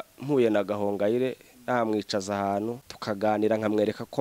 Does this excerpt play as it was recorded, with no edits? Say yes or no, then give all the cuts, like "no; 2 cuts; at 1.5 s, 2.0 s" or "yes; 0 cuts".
no; 1 cut; at 2.9 s